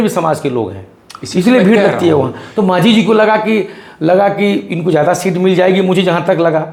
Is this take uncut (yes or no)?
yes